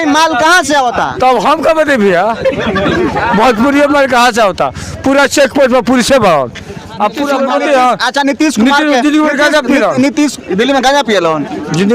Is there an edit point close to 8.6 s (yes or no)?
no